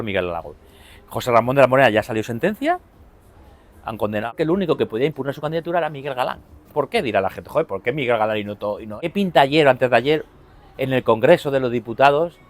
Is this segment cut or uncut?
cut